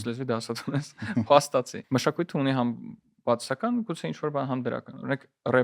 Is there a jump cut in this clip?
yes; 1 cut; at 1.8 s

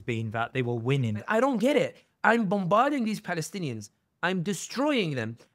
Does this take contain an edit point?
yes; 1 cut; at 1.2 s

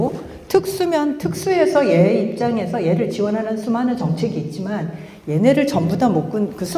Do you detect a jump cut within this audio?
no; 0 cuts

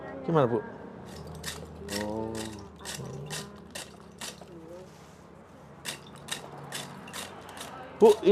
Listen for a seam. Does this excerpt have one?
yes; 1 cut; at 1.2 s

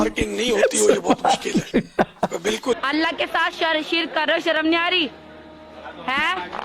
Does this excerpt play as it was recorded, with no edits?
no; 1 cut; at 2.8 s

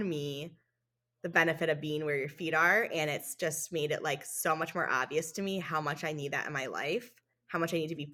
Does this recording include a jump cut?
no; 0 cuts

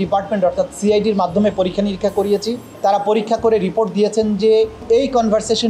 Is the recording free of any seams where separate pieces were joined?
no; 2 cuts; at 2.6 s, 4.8 s

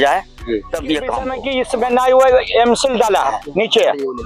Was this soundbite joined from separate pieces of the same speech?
yes; 1 cut; at 1.2 s

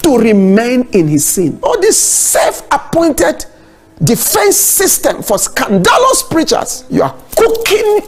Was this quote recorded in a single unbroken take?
no; 2 cuts; at 1.6 s, 6.8 s

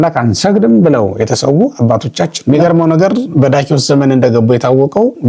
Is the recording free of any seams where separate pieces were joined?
no; 1 cut; at 2.4 s

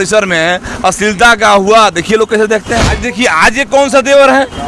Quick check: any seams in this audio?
yes; 1 cut; at 3.0 s

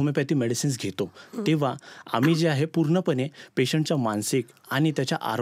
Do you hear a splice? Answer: no; 0 cuts

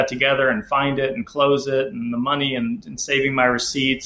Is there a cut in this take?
no; 0 cuts

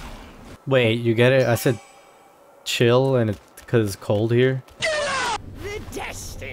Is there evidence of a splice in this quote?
no; 0 cuts

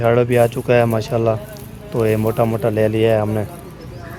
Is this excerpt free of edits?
yes; 0 cuts

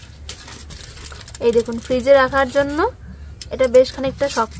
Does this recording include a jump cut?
no; 0 cuts

